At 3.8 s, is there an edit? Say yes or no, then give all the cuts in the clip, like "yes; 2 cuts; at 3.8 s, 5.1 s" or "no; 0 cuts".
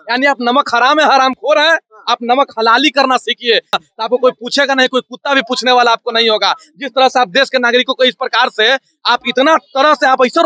yes; 1 cut; at 3.8 s